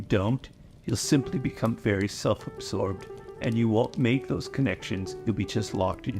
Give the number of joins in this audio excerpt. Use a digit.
1